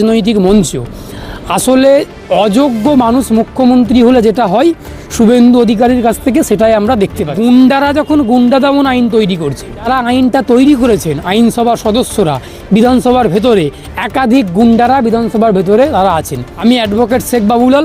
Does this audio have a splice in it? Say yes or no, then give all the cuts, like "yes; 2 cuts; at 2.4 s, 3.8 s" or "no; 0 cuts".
yes; 3 cuts; at 7.3 s, 9.8 s, 16.4 s